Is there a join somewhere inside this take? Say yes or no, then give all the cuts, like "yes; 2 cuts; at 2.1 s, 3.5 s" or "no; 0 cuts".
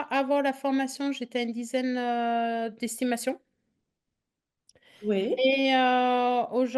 no; 0 cuts